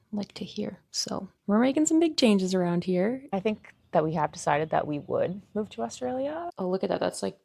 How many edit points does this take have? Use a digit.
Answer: 2